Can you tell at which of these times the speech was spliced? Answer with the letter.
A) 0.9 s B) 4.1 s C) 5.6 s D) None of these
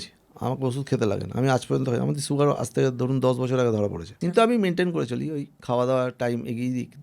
B